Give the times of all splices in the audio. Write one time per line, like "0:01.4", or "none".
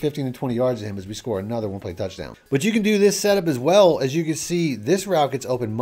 0:02.3

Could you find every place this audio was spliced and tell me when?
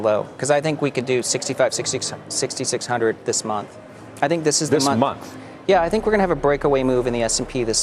none

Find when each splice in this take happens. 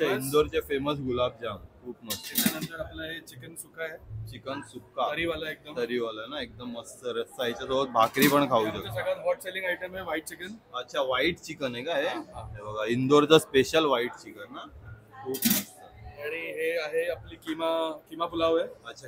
none

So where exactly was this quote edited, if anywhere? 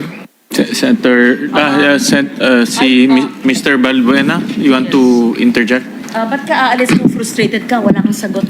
none

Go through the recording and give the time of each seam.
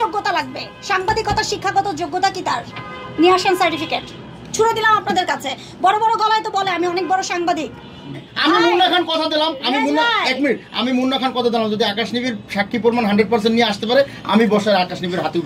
0:08.3

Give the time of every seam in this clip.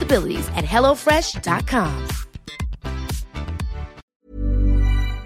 0:04.1

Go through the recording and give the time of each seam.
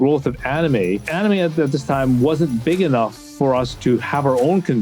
0:01.1
0:03.7

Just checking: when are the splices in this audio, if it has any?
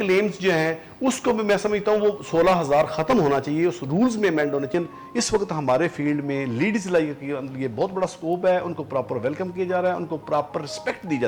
0:04.7

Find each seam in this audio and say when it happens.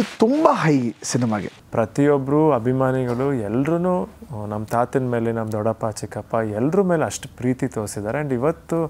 0:01.6

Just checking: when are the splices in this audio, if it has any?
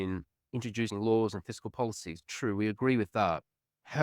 0:00.9

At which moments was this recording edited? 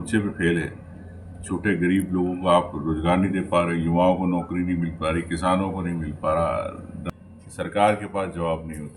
0:07.1

